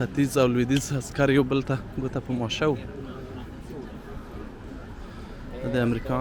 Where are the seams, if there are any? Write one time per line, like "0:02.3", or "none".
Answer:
none